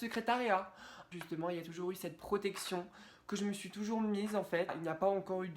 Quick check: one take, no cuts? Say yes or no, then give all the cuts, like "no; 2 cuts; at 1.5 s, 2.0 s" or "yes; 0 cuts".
no; 2 cuts; at 1.0 s, 4.8 s